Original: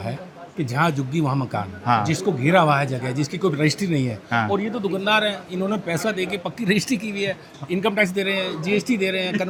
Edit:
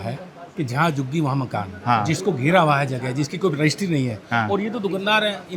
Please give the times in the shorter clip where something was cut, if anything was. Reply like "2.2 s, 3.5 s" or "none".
none